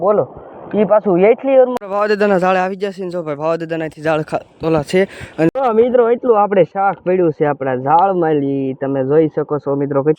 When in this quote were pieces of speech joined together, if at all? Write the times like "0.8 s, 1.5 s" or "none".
1.8 s, 5.5 s